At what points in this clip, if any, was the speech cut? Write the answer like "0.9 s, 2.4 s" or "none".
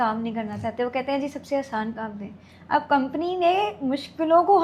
none